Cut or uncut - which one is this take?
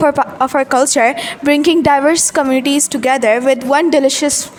uncut